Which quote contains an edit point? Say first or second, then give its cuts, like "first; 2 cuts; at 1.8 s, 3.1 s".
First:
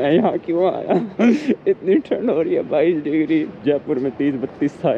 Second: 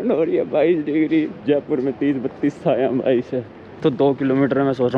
second; 1 cut; at 3.7 s